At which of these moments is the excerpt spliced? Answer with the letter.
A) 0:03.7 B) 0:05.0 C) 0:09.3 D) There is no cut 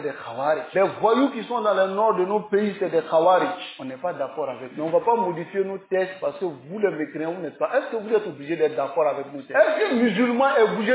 C